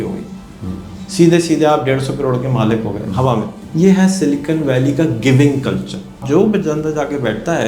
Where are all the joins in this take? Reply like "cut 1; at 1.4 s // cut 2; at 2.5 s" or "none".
cut 1; at 3.6 s // cut 2; at 6.2 s